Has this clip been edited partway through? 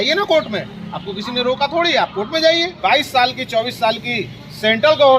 yes; 1 cut; at 2.8 s

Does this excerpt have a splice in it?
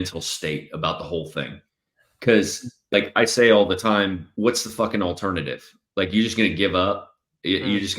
yes; 2 cuts; at 2.8 s, 4.2 s

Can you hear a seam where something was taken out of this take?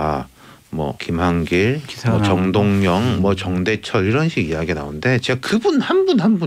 yes; 1 cut; at 1.0 s

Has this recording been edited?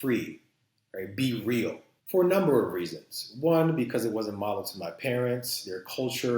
yes; 1 cut; at 1.9 s

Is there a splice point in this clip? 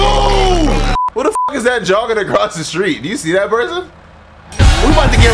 yes; 1 cut; at 0.9 s

